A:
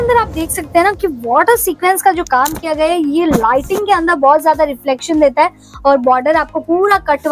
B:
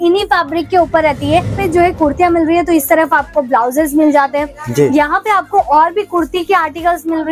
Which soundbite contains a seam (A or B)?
B